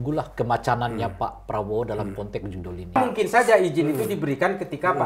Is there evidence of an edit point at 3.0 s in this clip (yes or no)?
yes